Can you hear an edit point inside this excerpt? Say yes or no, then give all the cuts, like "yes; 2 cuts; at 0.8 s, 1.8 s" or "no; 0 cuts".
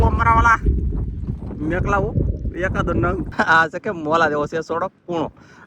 yes; 1 cut; at 3.3 s